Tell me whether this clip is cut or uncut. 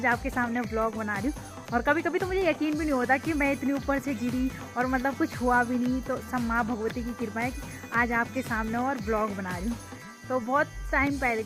uncut